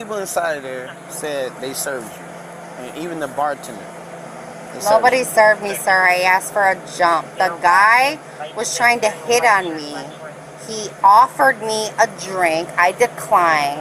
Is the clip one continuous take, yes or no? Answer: no